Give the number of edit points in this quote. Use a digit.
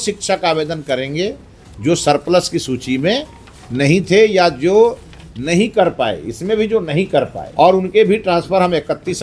1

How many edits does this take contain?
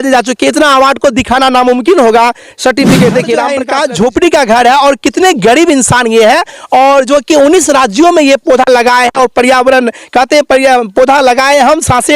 1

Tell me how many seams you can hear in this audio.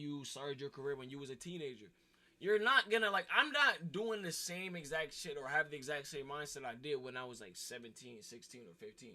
1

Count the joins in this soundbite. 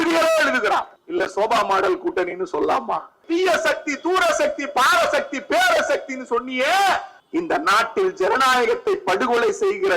3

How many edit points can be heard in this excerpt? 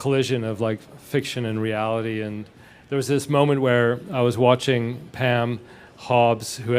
1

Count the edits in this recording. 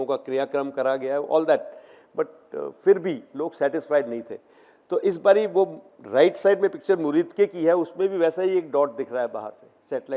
0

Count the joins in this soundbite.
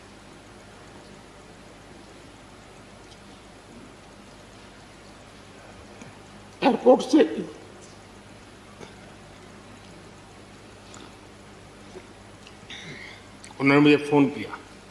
1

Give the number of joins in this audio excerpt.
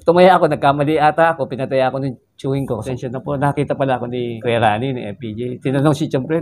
2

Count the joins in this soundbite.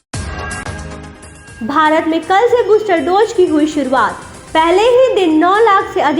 1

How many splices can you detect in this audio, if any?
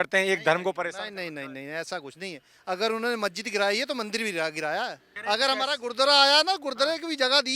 1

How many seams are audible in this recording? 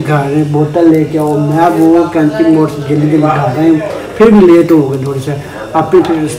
0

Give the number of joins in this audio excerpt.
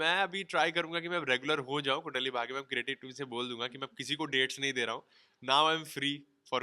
0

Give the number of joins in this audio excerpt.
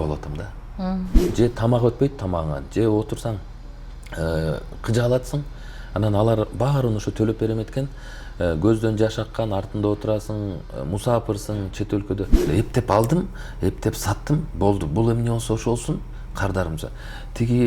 2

